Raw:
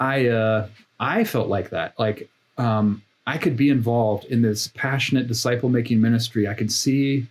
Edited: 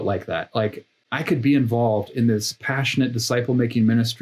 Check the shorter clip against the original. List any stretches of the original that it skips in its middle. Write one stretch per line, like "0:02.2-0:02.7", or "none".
0:02.4-0:03.1